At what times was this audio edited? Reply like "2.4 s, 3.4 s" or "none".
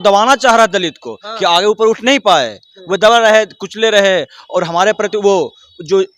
none